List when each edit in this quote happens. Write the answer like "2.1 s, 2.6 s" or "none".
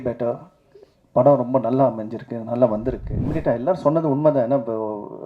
3.1 s